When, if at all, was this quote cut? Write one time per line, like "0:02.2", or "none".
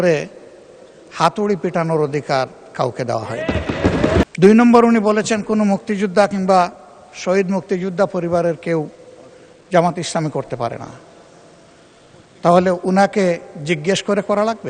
0:04.2